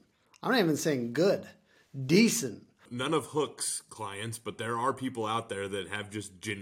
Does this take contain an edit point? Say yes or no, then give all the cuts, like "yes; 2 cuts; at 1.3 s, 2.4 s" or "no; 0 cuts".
yes; 1 cut; at 2.9 s